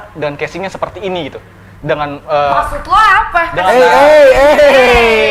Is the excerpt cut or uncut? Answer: uncut